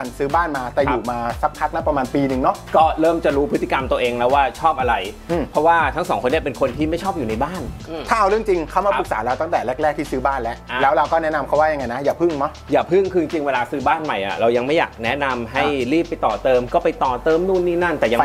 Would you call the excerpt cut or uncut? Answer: uncut